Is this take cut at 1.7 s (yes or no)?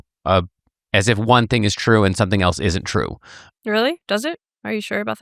no